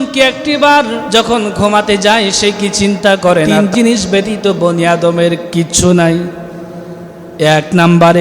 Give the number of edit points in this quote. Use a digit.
2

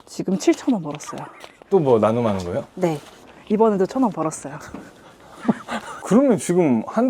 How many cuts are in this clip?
1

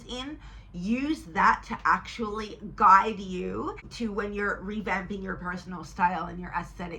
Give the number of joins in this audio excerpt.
1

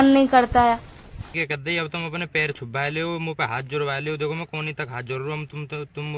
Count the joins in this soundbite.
1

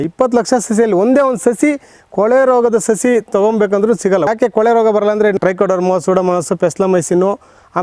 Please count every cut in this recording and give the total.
2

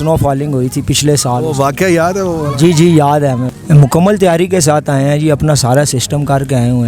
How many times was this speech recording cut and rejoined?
1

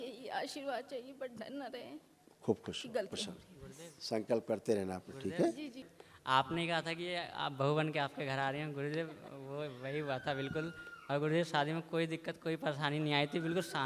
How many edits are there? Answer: 1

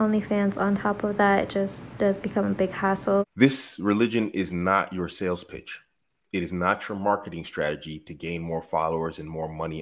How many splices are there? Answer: 1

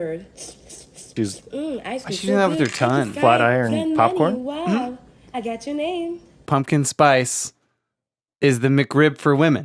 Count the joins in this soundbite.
1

